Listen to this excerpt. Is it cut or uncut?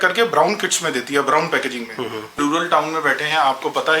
cut